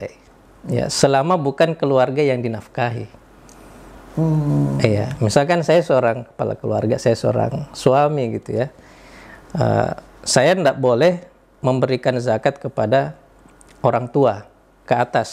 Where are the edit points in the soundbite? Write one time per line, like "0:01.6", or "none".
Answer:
none